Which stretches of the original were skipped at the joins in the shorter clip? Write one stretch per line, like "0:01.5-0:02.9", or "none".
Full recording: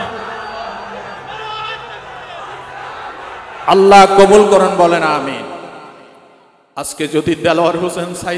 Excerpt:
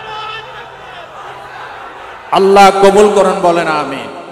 0:03.5-0:03.7

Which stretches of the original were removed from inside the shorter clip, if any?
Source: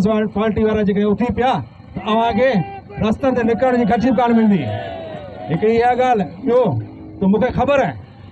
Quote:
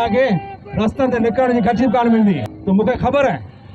0:04.7-0:07.1

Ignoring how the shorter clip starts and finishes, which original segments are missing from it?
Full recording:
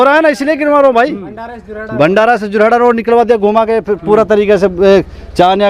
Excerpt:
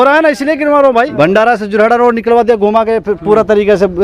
0:01.1-0:01.9

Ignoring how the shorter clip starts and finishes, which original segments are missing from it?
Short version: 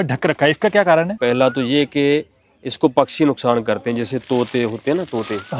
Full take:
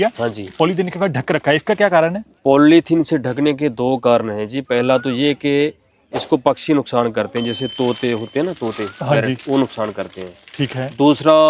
0:02.2-0:04.6

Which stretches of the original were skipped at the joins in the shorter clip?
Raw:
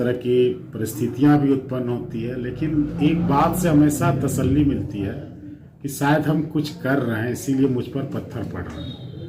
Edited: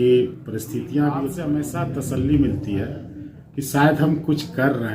0:01.6-0:03.6

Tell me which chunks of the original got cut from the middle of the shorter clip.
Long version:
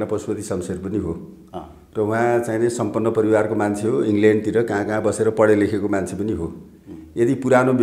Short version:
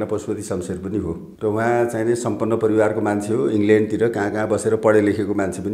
0:01.3-0:01.8

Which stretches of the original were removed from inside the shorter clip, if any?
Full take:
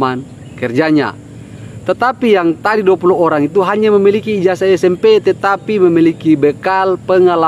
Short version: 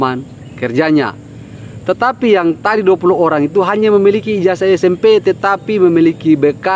none

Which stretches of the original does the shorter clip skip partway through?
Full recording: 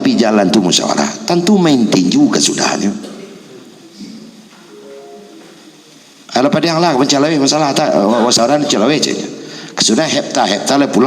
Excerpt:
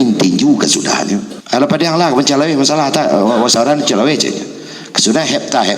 0:03.1-0:06.2

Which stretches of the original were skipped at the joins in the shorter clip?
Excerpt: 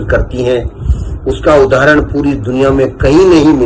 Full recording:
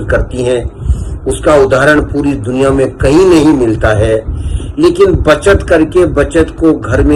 none

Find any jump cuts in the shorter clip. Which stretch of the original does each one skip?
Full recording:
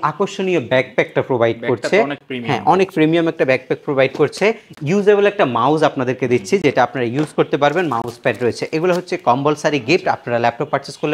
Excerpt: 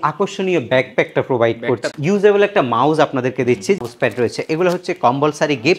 0:01.8-0:04.7
0:06.6-0:08.0

